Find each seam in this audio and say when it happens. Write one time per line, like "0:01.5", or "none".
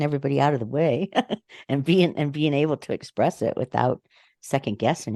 none